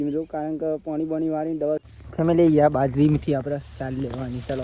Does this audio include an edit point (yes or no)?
yes